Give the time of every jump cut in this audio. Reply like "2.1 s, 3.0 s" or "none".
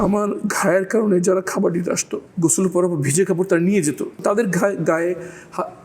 2.2 s, 4.2 s